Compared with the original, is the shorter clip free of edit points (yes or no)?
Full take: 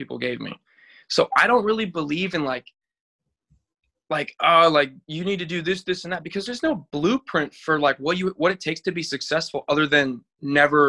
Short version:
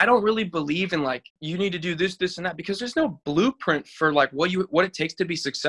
no